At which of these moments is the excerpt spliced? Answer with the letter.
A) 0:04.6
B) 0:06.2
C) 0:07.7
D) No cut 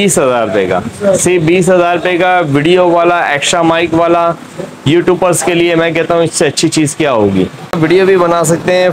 C